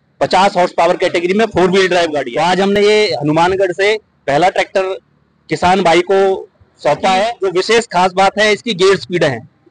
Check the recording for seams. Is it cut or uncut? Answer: uncut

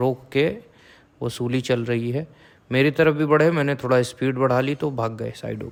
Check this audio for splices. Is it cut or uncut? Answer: uncut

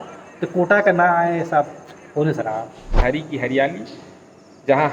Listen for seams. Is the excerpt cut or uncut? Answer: cut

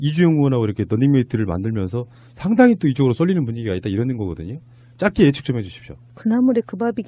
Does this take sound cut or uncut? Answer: cut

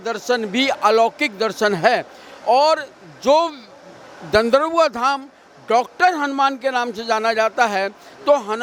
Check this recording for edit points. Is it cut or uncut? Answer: uncut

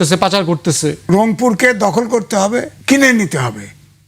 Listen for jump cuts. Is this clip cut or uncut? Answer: cut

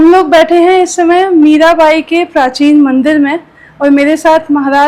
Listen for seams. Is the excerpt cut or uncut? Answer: uncut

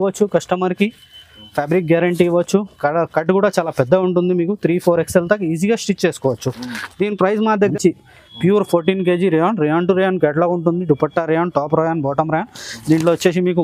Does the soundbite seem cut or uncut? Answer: cut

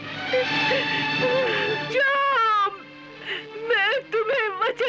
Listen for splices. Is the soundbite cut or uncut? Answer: cut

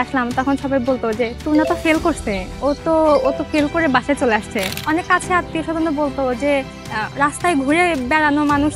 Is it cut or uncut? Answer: cut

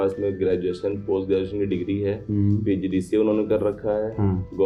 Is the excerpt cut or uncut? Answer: uncut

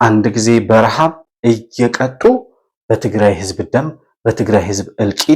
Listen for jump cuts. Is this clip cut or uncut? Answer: uncut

